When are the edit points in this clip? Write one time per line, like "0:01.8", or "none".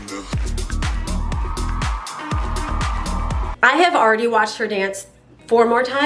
none